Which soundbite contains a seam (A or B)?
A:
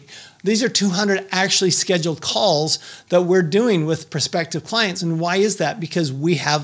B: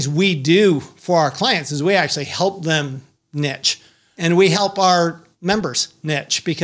B